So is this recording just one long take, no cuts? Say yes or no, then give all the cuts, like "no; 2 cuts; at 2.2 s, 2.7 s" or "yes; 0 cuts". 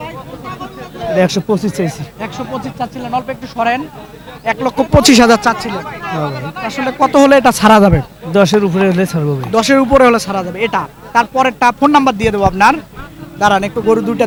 yes; 0 cuts